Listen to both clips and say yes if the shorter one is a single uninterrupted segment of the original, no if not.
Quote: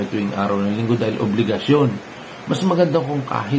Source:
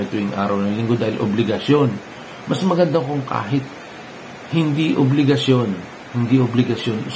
yes